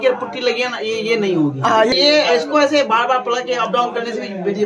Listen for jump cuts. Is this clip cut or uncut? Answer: cut